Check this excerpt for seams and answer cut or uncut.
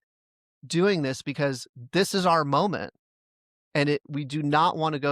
cut